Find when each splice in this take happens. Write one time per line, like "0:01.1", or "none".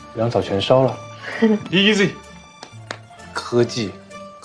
none